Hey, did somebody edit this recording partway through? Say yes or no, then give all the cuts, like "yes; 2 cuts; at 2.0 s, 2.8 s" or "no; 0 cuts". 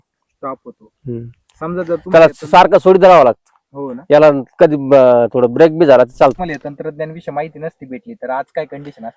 yes; 1 cut; at 6.4 s